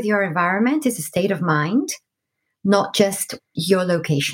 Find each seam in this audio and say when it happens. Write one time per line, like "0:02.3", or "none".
0:03.4